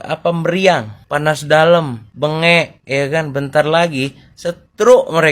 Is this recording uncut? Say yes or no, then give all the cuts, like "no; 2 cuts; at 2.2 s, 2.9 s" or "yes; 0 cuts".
no; 2 cuts; at 1.0 s, 2.0 s